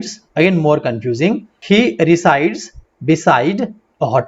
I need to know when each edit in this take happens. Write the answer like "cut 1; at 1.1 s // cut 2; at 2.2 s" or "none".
cut 1; at 1.5 s